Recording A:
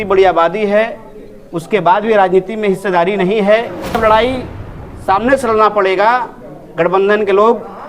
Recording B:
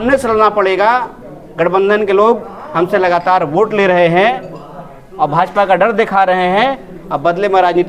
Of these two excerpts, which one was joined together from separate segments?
A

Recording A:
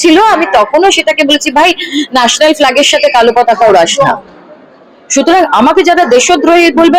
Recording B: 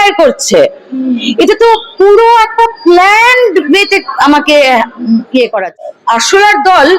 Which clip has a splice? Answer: B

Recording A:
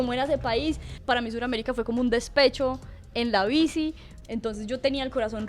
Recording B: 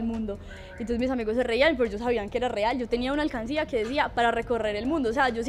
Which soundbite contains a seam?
A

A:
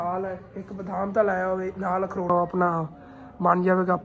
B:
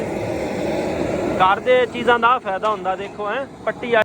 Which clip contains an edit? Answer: A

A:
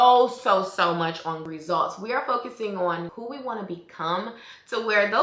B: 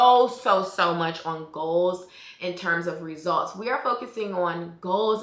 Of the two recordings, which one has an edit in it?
A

